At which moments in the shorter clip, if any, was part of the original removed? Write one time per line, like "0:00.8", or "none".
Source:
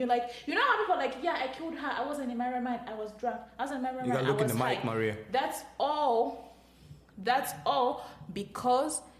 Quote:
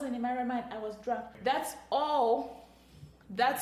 0:01.3